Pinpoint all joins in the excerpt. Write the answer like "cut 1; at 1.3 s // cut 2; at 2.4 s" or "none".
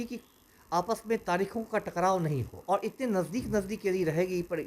cut 1; at 2.5 s